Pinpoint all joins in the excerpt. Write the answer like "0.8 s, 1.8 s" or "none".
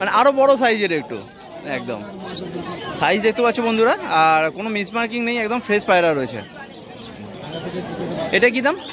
none

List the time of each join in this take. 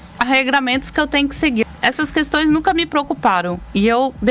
1.7 s

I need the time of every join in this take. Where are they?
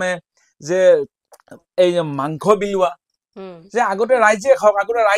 none

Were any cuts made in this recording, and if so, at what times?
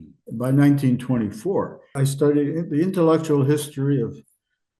1.9 s

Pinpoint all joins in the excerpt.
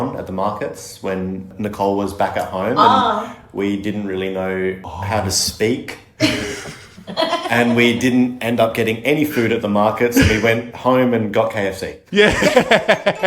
1.5 s, 4.9 s

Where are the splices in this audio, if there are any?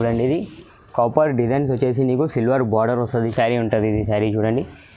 3.3 s

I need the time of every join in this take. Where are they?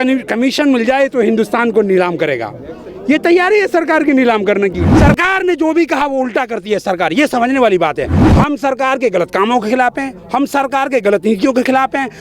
4.9 s, 8.2 s

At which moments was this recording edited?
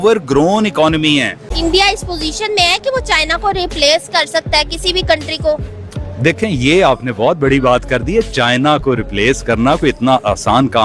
1.5 s

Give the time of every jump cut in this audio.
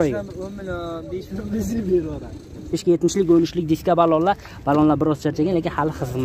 2.7 s

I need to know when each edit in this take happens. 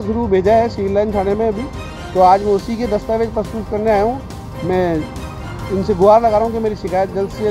none

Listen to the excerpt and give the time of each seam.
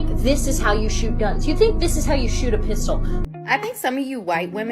3.3 s

